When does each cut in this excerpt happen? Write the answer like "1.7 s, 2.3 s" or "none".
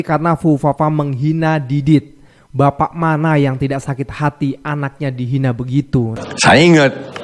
6.2 s